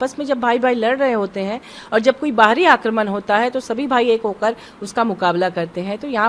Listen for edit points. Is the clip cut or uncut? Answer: uncut